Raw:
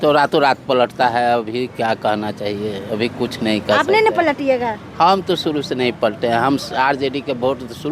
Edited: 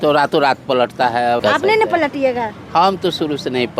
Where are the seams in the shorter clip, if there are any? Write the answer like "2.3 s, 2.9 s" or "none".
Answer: 1.4 s